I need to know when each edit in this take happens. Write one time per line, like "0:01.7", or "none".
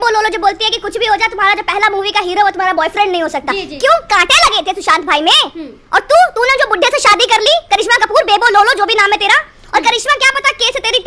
none